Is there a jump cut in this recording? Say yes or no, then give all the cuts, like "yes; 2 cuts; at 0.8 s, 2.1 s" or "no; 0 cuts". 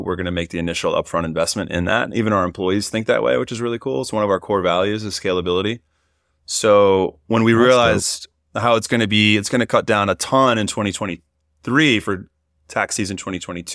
no; 0 cuts